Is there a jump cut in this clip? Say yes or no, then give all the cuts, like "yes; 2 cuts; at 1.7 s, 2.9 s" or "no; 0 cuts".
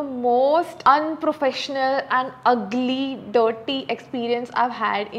no; 0 cuts